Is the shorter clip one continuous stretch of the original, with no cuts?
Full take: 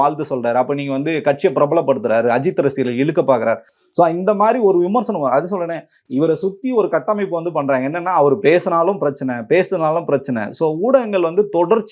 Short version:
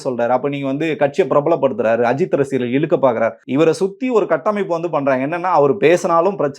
no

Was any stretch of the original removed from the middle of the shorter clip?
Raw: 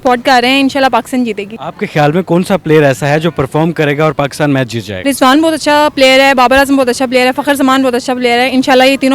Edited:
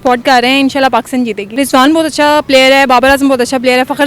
yes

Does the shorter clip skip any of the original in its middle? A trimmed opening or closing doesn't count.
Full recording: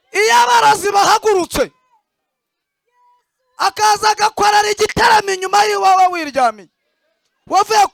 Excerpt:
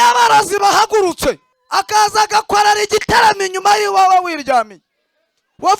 yes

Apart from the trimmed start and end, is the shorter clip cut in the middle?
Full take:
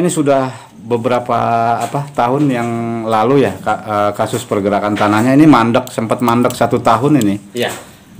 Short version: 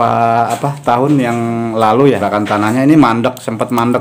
yes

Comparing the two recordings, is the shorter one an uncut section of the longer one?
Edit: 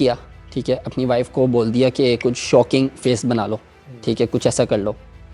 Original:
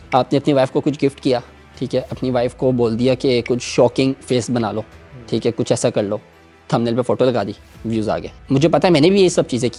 yes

